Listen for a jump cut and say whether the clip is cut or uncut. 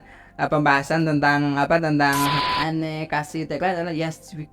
cut